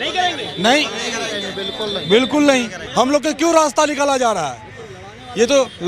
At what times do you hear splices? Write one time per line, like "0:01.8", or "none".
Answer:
0:02.8

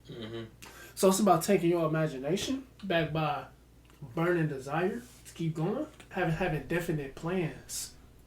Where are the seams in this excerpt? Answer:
0:02.7
0:06.1

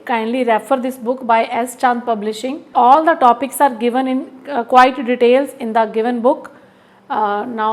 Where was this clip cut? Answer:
0:02.6

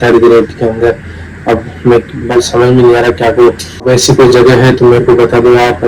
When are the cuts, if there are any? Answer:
0:03.8

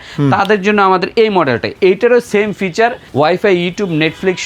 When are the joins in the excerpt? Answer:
0:01.7
0:03.0

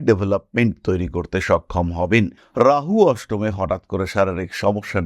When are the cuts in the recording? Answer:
0:02.4

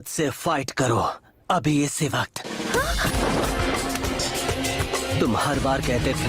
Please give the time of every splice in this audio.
0:03.2

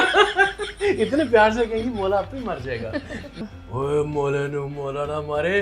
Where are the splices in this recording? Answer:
0:03.4

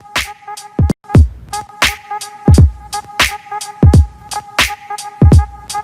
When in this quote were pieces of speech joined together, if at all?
0:00.9

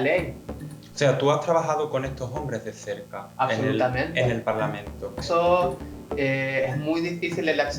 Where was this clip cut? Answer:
0:05.2

